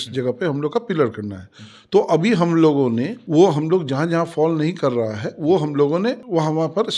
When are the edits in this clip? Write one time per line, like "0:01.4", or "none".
none